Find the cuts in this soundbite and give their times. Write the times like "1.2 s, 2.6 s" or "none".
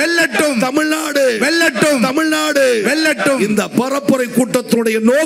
none

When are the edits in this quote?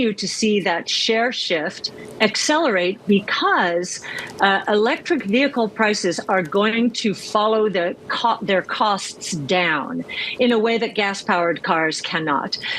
none

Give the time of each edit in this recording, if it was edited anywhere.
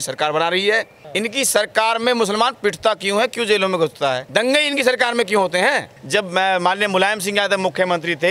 1.0 s, 4.2 s, 6.0 s

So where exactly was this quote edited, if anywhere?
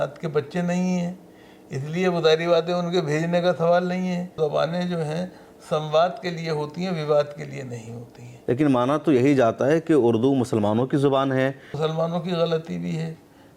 4.3 s, 8.3 s, 11.7 s

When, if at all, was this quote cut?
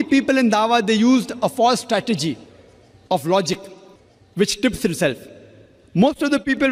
none

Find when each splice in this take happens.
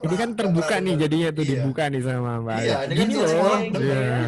none

